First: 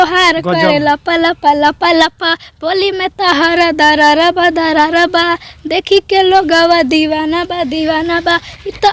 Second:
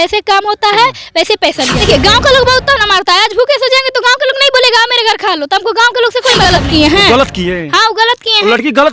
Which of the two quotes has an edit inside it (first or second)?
second